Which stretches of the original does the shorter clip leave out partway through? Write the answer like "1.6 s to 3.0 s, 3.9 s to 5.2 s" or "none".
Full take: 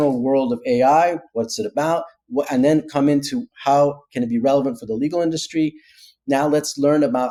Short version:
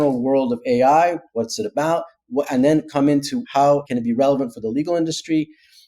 3.6 s to 3.9 s